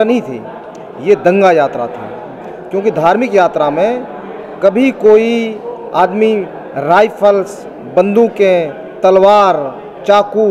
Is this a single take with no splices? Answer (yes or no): yes